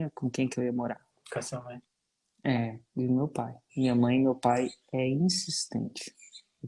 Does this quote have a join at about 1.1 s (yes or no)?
yes